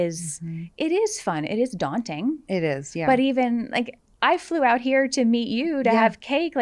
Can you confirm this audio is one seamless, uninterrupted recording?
yes; 0 cuts

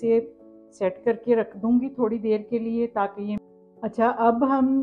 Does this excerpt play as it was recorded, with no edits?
no; 1 cut; at 3.4 s

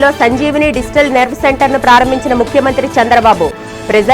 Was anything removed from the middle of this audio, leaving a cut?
no; 0 cuts

